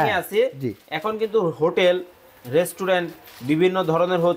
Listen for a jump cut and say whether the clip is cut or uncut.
uncut